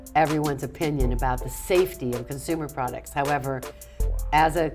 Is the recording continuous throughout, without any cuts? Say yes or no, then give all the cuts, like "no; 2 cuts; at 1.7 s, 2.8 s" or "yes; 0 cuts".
yes; 0 cuts